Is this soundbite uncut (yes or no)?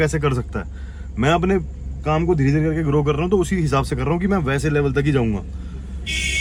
yes